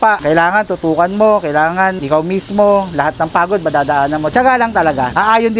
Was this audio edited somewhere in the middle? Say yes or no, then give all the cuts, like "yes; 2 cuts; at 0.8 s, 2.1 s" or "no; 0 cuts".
no; 0 cuts